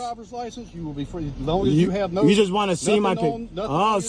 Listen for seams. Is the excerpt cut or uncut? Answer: uncut